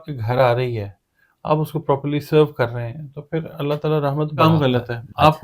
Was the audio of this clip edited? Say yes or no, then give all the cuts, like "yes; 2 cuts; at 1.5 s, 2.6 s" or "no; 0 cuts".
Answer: yes; 1 cut; at 4.4 s